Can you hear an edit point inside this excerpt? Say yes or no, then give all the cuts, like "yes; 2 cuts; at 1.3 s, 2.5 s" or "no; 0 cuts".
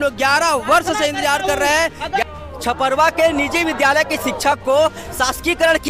yes; 1 cut; at 2.2 s